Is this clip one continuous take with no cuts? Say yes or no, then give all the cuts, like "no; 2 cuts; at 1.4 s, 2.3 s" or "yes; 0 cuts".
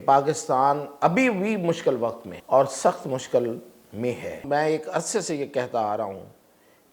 no; 2 cuts; at 2.3 s, 4.4 s